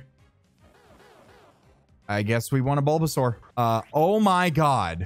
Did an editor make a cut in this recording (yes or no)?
yes